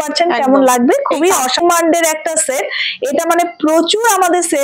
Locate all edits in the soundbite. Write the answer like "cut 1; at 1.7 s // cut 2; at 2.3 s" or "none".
cut 1; at 1.6 s